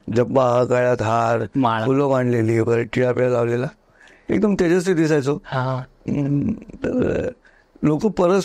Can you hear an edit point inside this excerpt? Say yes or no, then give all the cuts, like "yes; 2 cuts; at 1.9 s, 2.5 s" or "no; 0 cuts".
no; 0 cuts